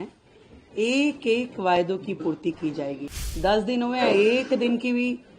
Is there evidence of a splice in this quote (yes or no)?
yes